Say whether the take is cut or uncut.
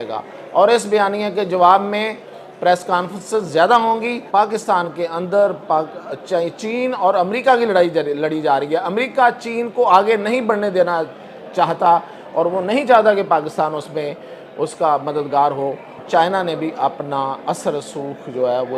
cut